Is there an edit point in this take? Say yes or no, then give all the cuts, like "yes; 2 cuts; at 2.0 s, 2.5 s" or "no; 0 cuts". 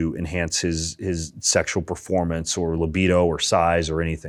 no; 0 cuts